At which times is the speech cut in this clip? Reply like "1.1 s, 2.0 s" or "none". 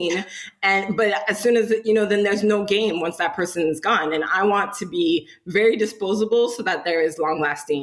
none